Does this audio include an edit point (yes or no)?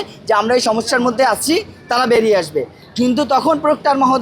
no